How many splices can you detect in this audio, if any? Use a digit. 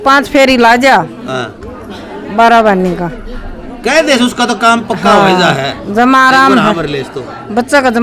1